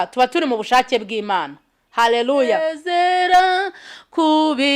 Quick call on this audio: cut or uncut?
cut